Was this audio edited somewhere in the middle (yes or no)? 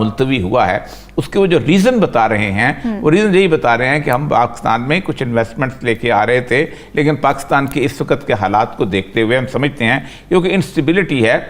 no